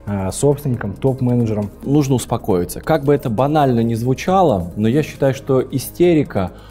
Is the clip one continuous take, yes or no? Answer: no